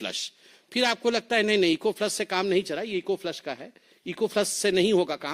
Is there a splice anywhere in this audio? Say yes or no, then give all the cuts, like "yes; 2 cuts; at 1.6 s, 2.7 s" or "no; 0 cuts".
no; 0 cuts